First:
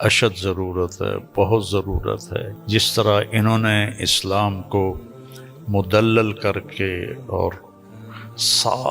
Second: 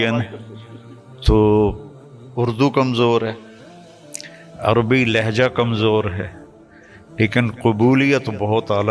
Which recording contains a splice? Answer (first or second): first